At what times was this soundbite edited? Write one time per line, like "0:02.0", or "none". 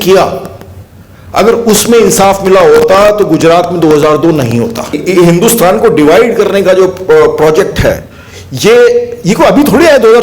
0:05.0